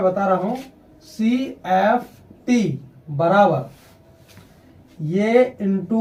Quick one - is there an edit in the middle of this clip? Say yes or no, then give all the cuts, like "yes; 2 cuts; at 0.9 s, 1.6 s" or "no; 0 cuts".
no; 0 cuts